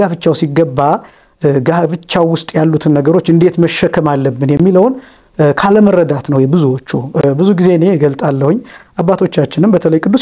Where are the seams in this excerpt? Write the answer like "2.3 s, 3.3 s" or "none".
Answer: none